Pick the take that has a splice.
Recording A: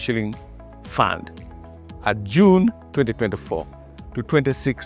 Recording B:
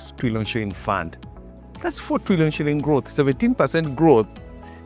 B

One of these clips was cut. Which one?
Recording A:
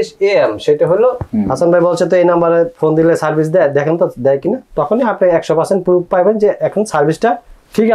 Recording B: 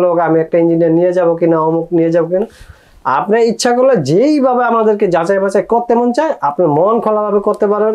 A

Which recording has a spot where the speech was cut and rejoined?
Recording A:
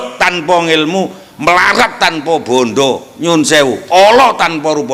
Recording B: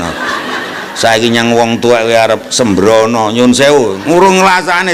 B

